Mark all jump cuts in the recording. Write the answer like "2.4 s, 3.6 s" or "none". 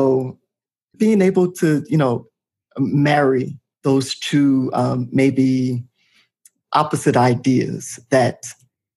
0.9 s, 3.6 s